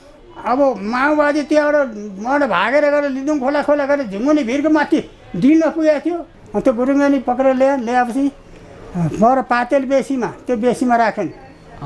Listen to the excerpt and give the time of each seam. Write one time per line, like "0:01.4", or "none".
0:06.3